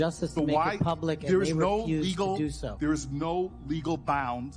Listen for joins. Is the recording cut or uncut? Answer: uncut